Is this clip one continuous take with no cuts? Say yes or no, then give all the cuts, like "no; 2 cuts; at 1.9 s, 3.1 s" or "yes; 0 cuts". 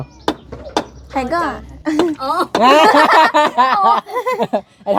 yes; 0 cuts